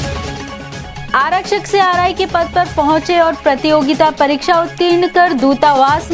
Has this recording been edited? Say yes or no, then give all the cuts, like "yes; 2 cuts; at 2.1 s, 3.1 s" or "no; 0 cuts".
yes; 1 cut; at 0.9 s